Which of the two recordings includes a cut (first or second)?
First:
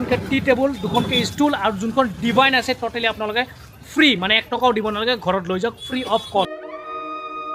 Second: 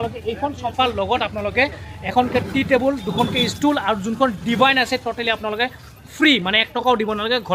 first